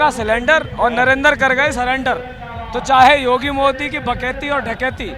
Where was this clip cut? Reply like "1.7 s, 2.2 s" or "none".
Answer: none